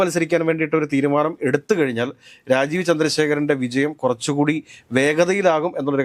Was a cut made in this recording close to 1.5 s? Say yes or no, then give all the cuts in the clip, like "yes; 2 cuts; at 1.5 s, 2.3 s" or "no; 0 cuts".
no; 0 cuts